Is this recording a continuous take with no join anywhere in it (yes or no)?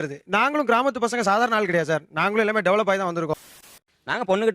no